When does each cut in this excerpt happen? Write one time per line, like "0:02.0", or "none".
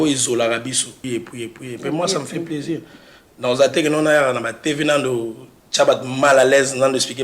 0:00.9